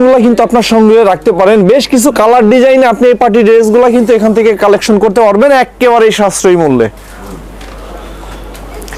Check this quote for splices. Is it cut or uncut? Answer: uncut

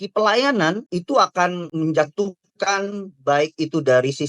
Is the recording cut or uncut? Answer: cut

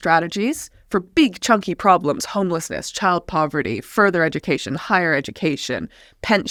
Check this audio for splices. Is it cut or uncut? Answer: uncut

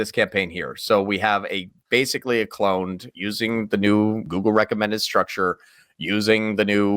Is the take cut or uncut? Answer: cut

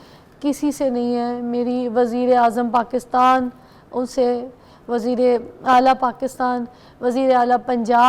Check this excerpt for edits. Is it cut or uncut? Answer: uncut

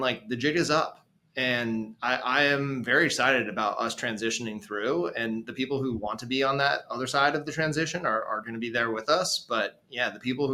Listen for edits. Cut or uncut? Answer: uncut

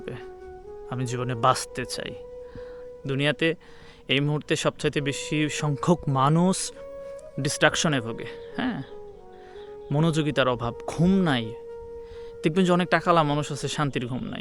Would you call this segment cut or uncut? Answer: cut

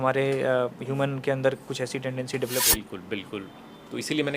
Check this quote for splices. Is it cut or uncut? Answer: cut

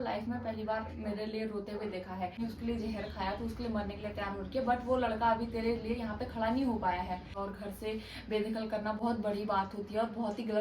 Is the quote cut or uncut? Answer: cut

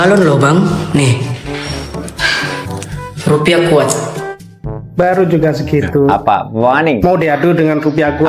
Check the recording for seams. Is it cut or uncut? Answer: uncut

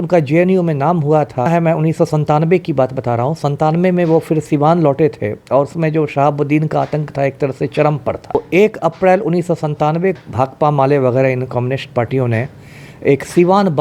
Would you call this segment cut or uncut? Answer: cut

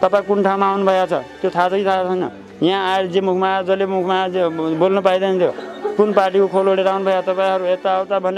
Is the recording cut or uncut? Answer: uncut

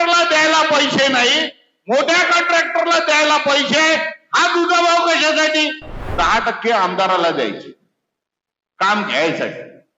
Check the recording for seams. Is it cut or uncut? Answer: cut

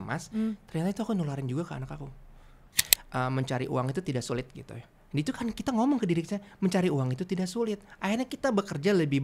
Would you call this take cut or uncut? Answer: cut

